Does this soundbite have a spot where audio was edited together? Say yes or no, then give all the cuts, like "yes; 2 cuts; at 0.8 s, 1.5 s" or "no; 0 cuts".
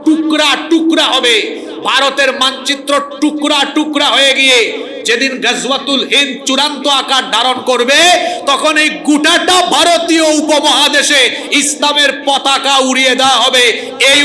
no; 0 cuts